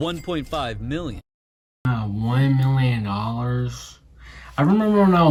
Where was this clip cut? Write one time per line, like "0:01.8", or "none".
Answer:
none